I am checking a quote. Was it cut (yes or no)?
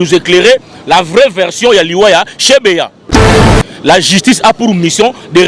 yes